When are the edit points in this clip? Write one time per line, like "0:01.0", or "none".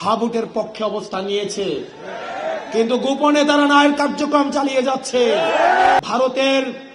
0:06.0